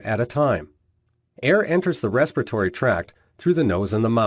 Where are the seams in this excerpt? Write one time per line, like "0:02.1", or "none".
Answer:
none